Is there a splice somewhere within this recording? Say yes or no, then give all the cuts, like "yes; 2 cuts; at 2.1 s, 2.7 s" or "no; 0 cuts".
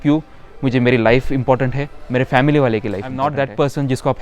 yes; 1 cut; at 3.3 s